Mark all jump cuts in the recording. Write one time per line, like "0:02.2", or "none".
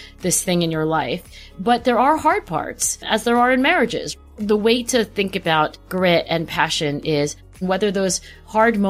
0:04.1
0:05.8
0:07.6

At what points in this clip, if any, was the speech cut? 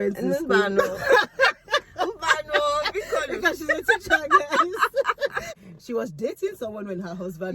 0:05.5

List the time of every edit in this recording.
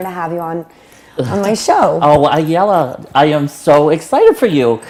none

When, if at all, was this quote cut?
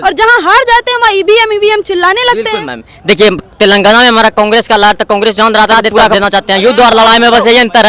0:06.1

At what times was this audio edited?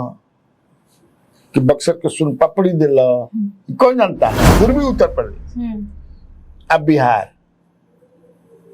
0:04.5

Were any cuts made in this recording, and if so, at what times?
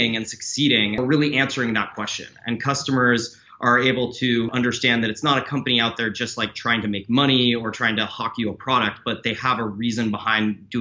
0:01.0
0:04.5

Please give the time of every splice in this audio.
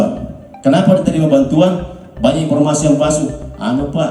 none

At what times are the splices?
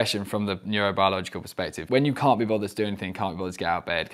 0:01.8

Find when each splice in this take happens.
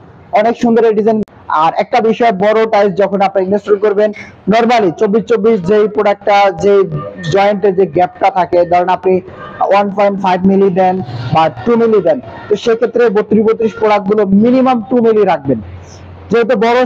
0:01.2

